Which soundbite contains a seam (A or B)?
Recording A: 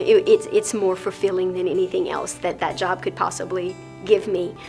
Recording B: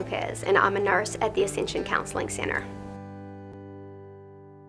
B